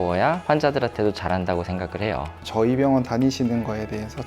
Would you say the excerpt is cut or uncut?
cut